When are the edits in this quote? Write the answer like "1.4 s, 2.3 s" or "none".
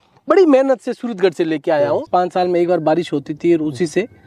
2.1 s